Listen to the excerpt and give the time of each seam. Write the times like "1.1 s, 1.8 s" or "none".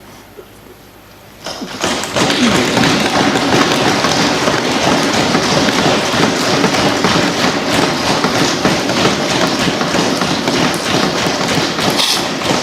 none